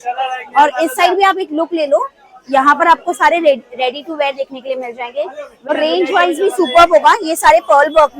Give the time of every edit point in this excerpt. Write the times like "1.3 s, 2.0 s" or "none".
5.7 s